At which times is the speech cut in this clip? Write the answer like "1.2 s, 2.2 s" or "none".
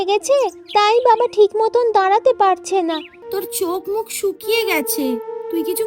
3.2 s